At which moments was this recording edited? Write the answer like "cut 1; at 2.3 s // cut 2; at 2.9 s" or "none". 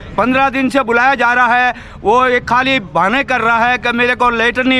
none